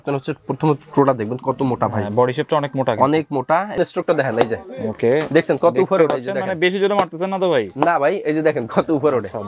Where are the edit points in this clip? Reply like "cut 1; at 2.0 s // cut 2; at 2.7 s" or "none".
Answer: cut 1; at 3.8 s